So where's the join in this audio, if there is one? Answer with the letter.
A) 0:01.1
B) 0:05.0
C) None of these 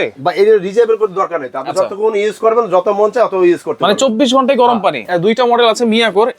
B